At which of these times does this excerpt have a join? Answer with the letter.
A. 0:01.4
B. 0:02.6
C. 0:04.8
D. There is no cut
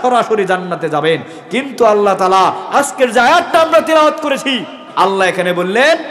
C